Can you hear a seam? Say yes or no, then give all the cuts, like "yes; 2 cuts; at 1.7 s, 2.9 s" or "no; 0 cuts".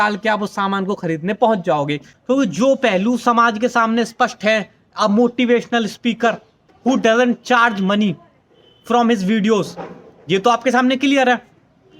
yes; 2 cuts; at 2.1 s, 6.7 s